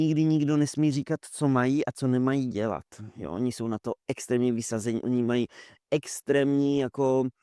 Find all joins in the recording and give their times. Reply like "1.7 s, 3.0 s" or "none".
none